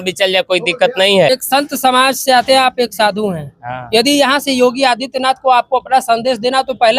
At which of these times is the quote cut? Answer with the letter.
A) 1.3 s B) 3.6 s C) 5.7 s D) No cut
A